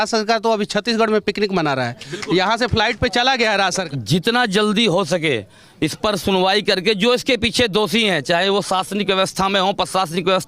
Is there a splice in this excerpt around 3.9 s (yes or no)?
yes